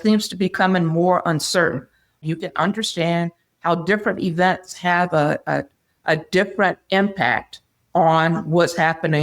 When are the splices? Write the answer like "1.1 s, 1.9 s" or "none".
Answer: 2.2 s